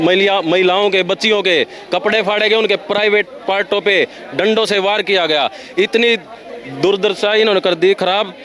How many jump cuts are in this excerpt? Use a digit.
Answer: 0